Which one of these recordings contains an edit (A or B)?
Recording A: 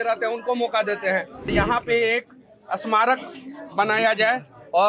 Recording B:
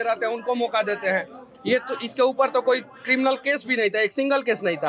A